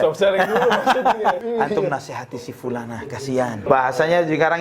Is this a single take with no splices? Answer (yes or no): no